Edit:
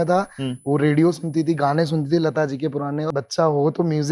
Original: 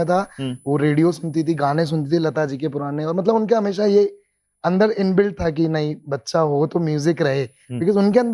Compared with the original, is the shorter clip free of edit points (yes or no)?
no